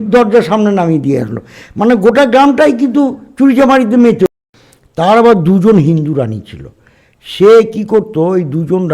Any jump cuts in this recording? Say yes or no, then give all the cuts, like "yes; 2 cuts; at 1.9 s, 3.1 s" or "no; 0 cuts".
yes; 1 cut; at 4.3 s